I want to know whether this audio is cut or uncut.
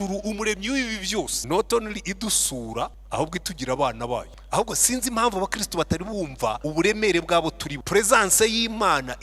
cut